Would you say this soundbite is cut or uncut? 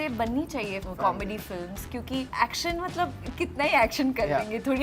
cut